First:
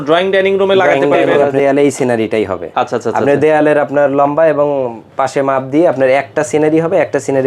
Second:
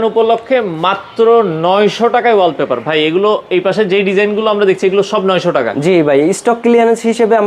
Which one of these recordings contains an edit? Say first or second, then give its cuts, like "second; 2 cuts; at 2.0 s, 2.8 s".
first; 1 cut; at 1.5 s